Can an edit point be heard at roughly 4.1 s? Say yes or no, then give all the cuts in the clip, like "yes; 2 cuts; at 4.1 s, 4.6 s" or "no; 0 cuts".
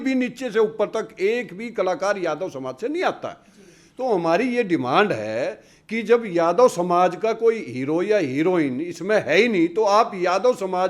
no; 0 cuts